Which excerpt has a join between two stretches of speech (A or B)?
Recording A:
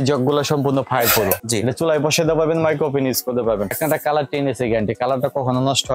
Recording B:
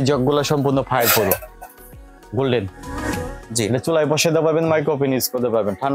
A